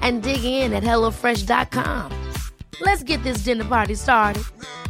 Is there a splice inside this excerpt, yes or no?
no